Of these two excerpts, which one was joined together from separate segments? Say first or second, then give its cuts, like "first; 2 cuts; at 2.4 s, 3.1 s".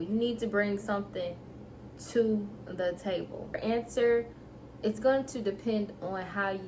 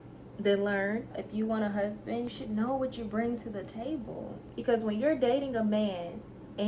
second; 2 cuts; at 1.2 s, 4.4 s